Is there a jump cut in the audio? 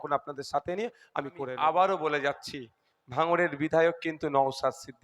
yes; 1 cut; at 1.5 s

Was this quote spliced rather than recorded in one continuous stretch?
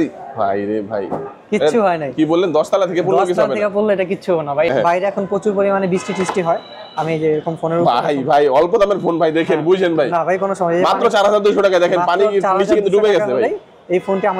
yes; 1 cut; at 4.7 s

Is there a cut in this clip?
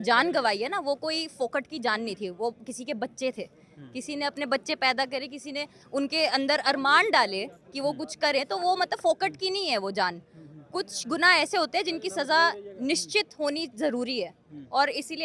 no; 0 cuts

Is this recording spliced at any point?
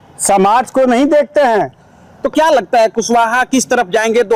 no; 0 cuts

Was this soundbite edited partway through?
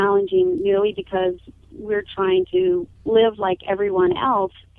yes; 1 cut; at 2.9 s

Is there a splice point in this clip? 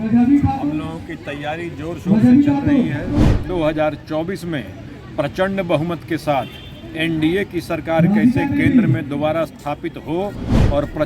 yes; 1 cut; at 3.2 s

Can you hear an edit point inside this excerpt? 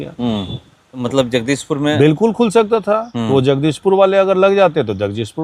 yes; 1 cut; at 0.9 s

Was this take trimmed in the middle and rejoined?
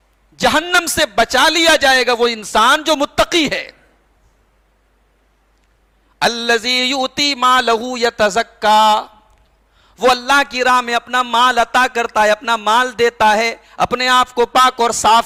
no; 0 cuts

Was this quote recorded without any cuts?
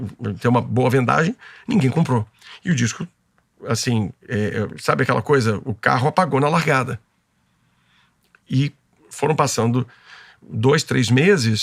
yes; 0 cuts

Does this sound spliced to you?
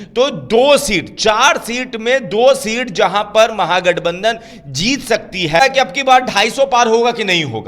yes; 1 cut; at 5.6 s

